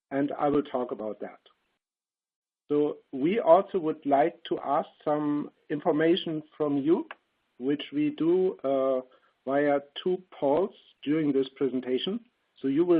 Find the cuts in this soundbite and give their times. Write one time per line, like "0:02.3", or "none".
0:08.2